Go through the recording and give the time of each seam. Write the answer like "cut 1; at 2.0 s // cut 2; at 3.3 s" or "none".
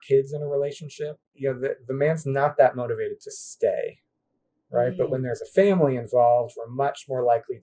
cut 1; at 1.2 s